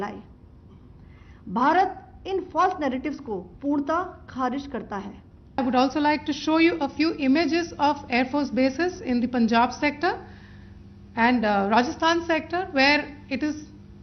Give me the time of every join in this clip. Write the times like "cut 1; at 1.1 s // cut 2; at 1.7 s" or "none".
cut 1; at 5.6 s

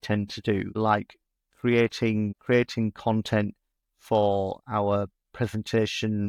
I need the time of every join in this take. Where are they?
none

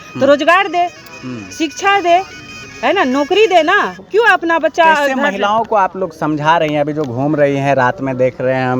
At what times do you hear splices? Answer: none

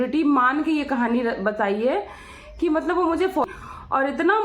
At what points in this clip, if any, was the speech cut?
cut 1; at 3.4 s

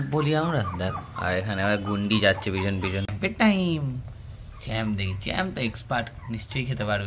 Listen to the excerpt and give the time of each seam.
cut 1; at 3.1 s

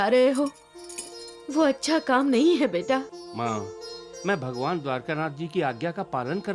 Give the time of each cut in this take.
cut 1; at 3.2 s

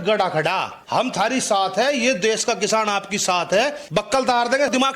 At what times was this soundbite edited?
cut 1; at 0.9 s // cut 2; at 3.8 s

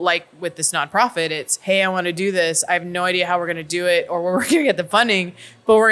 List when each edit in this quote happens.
cut 1; at 1.5 s

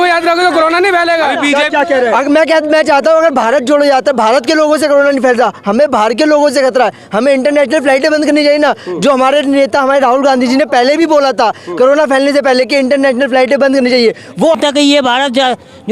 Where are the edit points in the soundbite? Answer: cut 1; at 14.6 s

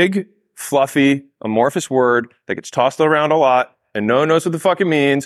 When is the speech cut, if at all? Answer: none

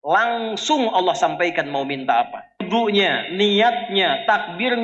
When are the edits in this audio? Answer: cut 1; at 2.7 s

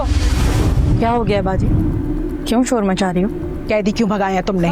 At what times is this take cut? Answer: none

